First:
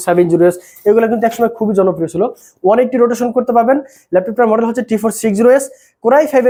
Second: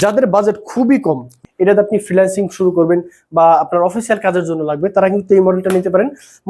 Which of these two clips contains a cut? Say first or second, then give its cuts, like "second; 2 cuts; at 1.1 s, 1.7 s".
second; 1 cut; at 1.3 s